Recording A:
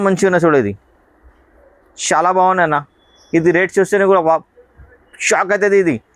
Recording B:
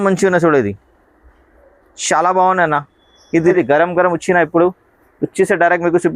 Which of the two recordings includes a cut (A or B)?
B